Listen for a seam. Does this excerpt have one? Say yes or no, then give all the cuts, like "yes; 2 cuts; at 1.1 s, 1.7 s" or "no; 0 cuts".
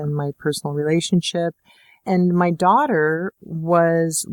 yes; 1 cut; at 1.9 s